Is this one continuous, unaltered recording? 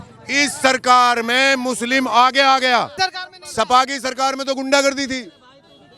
no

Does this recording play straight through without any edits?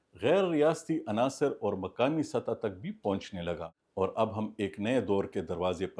no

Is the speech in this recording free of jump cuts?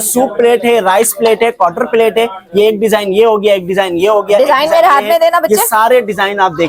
yes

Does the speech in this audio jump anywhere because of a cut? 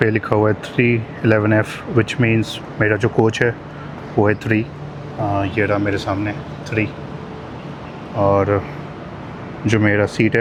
no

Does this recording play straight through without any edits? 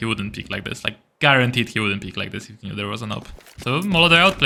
yes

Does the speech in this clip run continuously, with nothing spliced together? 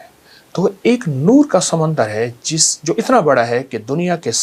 yes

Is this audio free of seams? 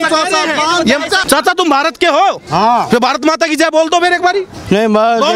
no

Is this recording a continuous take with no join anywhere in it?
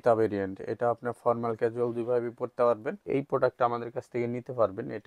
no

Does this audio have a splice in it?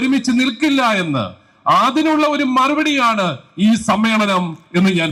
no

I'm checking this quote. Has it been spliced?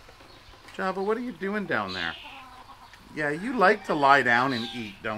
no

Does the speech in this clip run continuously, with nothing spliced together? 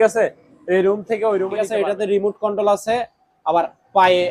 no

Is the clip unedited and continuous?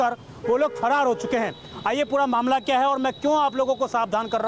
yes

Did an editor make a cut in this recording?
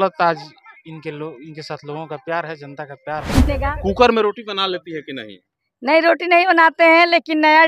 yes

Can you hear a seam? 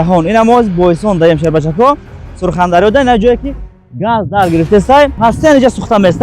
yes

